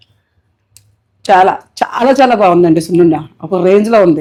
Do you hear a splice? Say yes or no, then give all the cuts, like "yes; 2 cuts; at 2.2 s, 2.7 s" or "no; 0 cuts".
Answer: no; 0 cuts